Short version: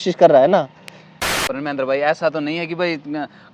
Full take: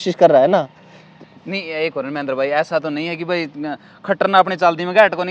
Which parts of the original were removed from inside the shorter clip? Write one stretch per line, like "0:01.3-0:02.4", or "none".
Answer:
0:01.5-0:01.9